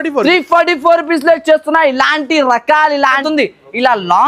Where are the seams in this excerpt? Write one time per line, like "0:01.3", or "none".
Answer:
0:03.2